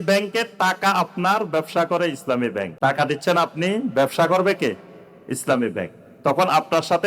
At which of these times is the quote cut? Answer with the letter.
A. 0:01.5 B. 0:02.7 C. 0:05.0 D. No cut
B